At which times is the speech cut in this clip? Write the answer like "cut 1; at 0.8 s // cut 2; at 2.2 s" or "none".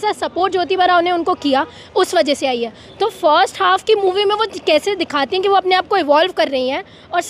none